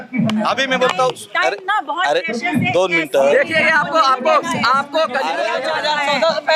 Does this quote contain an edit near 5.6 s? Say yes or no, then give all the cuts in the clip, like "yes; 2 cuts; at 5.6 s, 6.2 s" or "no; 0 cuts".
yes; 1 cut; at 5.6 s